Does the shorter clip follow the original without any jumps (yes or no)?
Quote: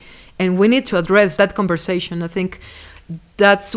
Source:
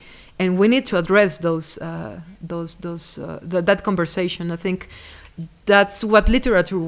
no